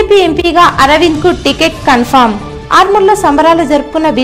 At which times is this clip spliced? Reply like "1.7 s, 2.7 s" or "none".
none